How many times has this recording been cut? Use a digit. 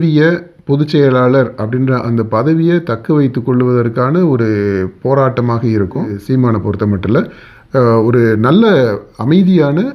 1